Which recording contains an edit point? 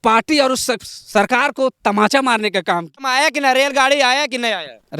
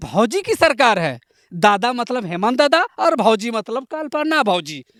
first; 1 cut; at 3.1 s

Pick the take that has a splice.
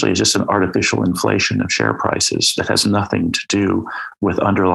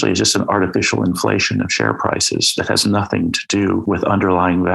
second; 1 cut; at 3.8 s

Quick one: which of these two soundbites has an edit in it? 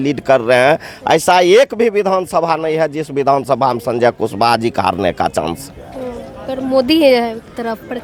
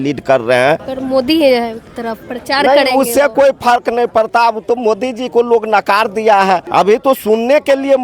second; 2 cuts; at 0.9 s, 6.7 s

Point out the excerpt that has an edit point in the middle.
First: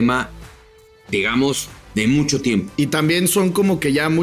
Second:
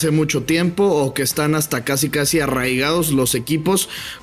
first; 1 cut; at 2.7 s

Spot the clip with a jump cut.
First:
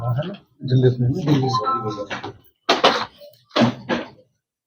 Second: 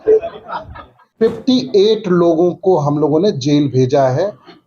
second; 1 cut; at 1.0 s

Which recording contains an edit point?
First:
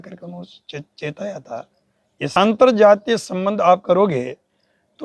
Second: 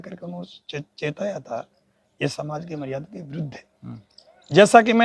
first; 1 cut; at 2.3 s

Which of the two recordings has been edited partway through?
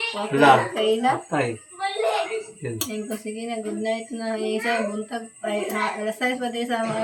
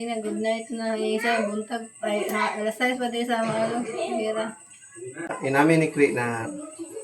second; 1 cut; at 5.3 s

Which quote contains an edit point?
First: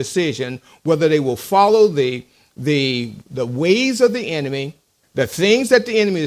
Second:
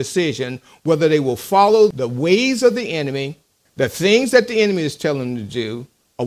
second; 1 cut; at 1.9 s

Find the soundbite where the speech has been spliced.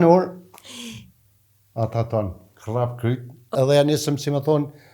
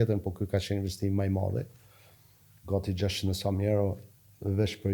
first; 1 cut; at 3.5 s

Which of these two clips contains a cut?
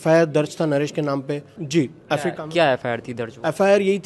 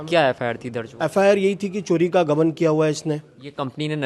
first; 1 cut; at 1.5 s

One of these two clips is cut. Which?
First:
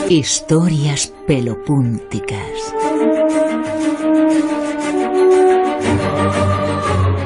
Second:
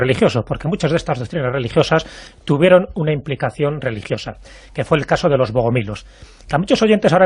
second; 1 cut; at 3.3 s

